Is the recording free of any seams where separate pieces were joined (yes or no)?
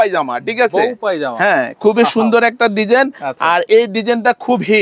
yes